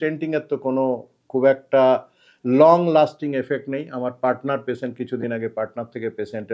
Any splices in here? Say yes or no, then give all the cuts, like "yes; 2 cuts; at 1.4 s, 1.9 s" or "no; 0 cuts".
no; 0 cuts